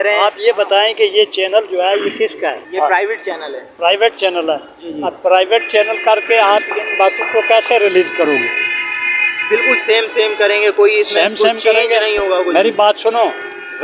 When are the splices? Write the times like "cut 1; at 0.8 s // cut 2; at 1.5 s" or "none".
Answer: none